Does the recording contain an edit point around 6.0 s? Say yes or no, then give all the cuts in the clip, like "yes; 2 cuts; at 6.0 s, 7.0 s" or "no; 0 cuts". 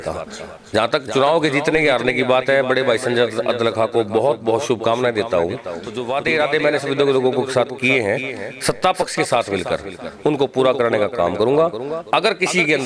yes; 1 cut; at 6.0 s